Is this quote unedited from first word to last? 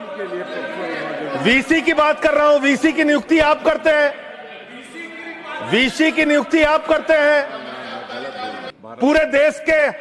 no; 1 cut; at 8.7 s

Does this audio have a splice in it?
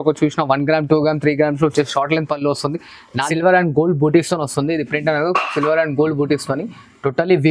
yes; 1 cut; at 3.1 s

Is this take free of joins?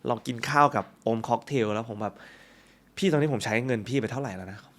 yes; 0 cuts

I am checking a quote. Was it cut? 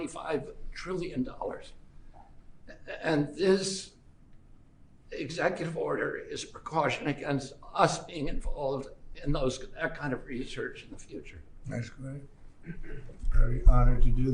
no; 0 cuts

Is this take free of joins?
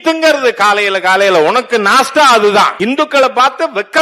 no; 1 cut; at 2.7 s

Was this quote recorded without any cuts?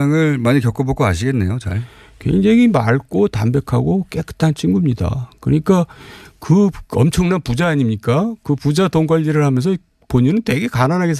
yes; 0 cuts

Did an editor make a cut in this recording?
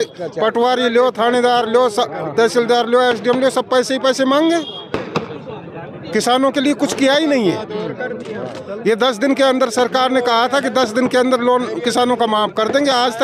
no; 0 cuts

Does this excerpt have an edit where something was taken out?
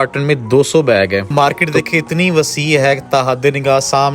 yes; 1 cut; at 1.3 s

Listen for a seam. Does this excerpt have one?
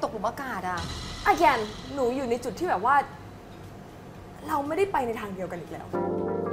no; 0 cuts

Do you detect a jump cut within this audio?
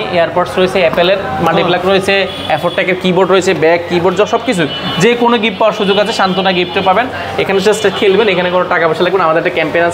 no; 0 cuts

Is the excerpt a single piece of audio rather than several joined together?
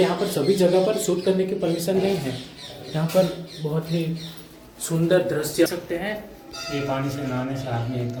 yes; 0 cuts

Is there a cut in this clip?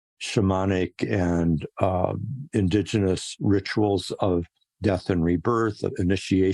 no; 0 cuts

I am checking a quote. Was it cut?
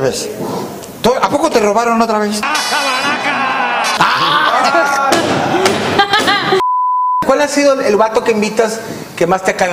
no; 0 cuts

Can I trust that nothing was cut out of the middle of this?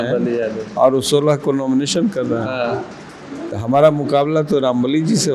yes; 0 cuts

